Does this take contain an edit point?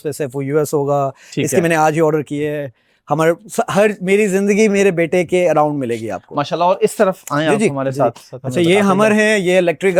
no; 0 cuts

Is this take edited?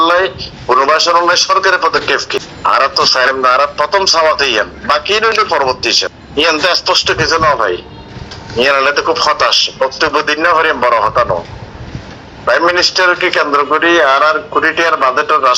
yes; 2 cuts; at 2.5 s, 6.2 s

